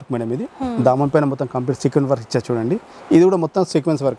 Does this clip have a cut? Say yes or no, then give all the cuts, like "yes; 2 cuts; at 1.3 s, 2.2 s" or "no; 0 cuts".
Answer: no; 0 cuts